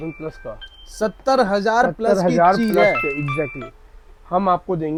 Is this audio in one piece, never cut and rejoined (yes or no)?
yes